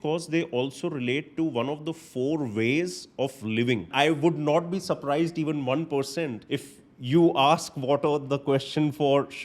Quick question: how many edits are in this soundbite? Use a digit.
2